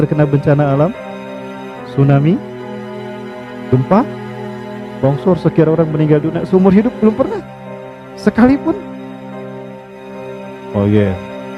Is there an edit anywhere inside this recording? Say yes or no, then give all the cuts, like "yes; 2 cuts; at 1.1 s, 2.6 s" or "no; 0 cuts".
no; 0 cuts